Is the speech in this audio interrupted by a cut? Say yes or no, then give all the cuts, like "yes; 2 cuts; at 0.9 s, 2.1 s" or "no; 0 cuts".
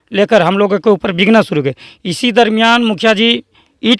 no; 0 cuts